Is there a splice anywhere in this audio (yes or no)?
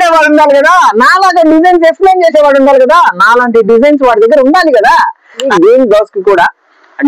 yes